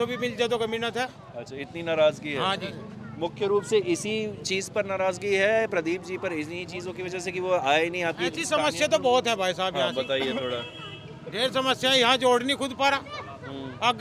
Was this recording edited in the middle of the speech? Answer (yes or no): no